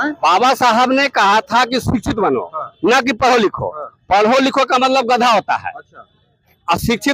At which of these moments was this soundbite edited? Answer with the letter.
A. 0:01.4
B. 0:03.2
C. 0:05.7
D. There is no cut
D